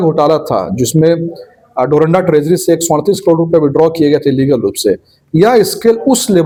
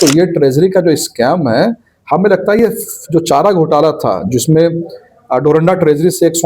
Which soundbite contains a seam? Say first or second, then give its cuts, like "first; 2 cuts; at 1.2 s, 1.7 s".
second; 1 cut; at 2.6 s